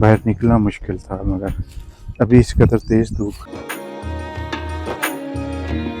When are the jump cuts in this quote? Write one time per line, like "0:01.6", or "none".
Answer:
0:03.4